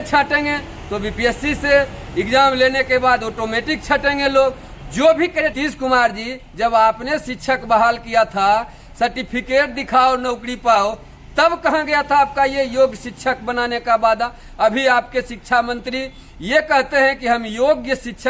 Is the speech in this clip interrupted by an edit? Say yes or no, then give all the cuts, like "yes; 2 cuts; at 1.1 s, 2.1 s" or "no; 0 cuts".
yes; 1 cut; at 5.5 s